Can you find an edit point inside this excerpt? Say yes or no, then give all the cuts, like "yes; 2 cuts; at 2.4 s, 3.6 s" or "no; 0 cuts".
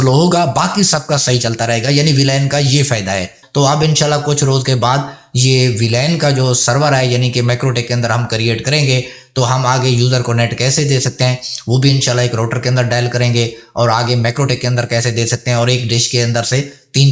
yes; 1 cut; at 3.4 s